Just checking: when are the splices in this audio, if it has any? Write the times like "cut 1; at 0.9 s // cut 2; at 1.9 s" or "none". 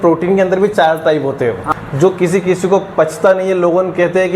cut 1; at 1.7 s